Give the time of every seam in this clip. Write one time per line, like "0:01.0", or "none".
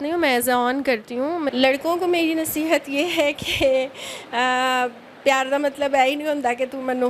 0:01.5